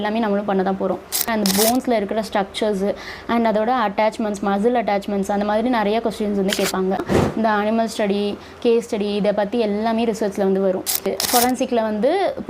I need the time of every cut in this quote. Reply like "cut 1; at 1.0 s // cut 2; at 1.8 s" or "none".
cut 1; at 1.3 s // cut 2; at 7.2 s // cut 3; at 11.1 s

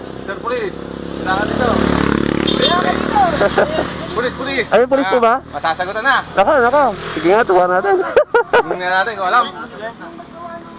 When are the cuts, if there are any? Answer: none

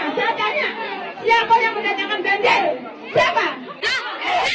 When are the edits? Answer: none

